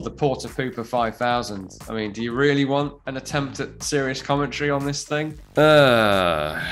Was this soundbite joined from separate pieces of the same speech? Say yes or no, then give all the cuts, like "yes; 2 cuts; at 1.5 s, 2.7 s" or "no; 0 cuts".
yes; 2 cuts; at 3.0 s, 5.4 s